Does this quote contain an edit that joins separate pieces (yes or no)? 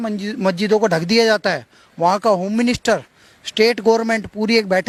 no